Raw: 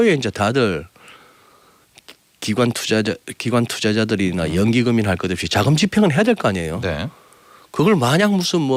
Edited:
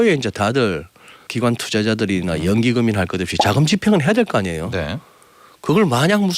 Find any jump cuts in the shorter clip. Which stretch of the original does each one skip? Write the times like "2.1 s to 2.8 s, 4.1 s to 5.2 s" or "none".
1.2 s to 3.3 s